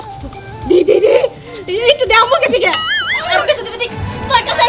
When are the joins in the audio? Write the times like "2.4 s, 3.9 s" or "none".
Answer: 2.8 s